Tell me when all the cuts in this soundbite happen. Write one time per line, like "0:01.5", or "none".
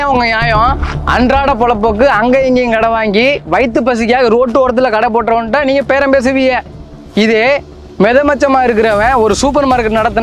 none

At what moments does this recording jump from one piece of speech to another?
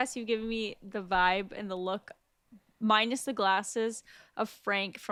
none

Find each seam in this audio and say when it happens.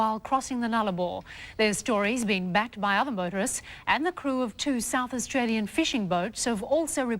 0:03.7

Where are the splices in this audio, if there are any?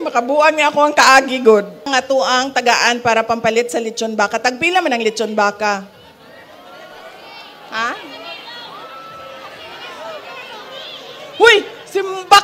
0:01.9

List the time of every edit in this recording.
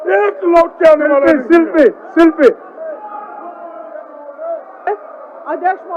none

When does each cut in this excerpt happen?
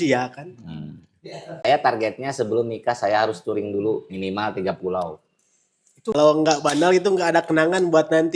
0:01.6
0:06.1

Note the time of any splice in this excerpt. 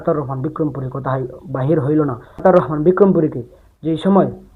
0:02.3

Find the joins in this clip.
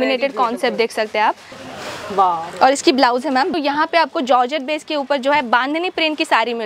0:01.5
0:03.5

